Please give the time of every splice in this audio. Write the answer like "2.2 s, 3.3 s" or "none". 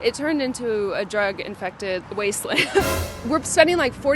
3.0 s